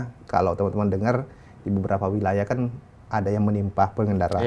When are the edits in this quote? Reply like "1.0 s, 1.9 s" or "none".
none